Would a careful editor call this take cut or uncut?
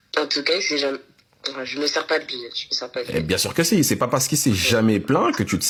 uncut